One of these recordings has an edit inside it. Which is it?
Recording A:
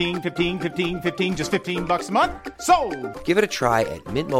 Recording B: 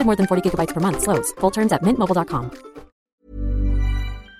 B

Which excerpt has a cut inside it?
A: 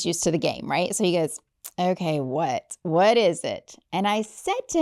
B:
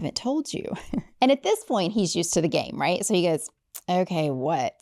B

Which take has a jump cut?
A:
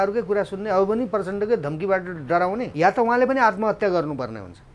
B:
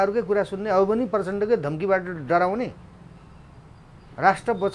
A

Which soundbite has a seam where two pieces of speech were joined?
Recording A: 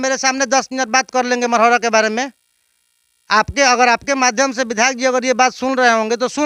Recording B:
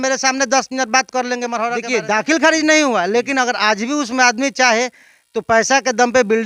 B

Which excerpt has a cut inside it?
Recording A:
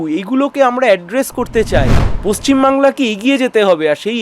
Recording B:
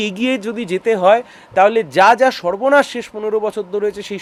A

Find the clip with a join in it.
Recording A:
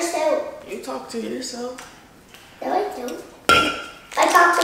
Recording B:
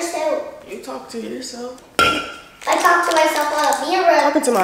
B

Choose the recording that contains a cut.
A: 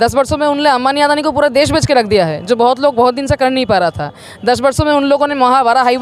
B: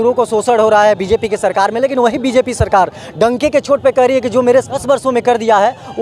B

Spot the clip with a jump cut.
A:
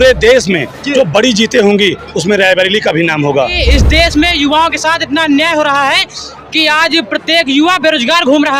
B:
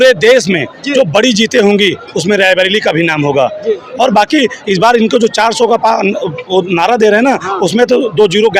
A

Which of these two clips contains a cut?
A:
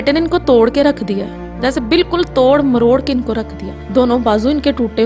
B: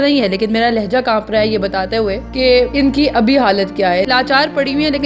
B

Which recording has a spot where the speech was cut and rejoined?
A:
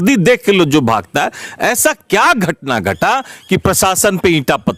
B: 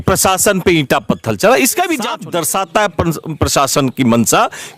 B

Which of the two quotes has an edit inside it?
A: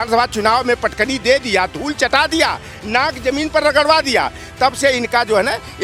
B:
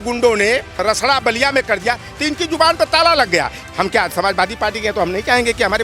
B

